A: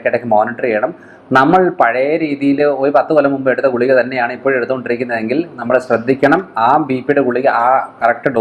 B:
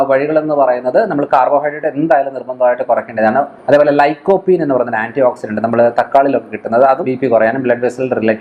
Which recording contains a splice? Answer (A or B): B